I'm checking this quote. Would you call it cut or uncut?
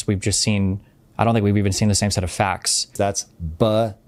cut